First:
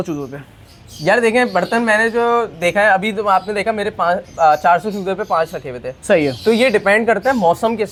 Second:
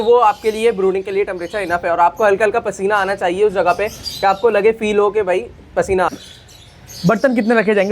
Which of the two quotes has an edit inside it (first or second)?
second